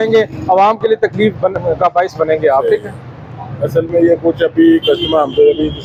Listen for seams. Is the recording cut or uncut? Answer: uncut